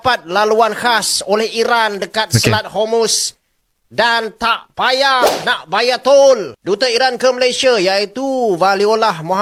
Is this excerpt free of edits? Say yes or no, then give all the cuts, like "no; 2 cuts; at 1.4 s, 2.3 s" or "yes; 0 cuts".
yes; 0 cuts